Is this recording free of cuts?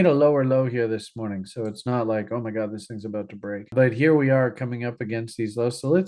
yes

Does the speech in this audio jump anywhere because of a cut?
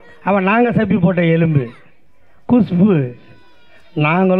no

